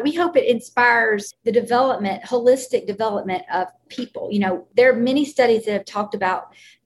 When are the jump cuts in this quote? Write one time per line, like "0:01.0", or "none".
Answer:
0:01.3
0:04.6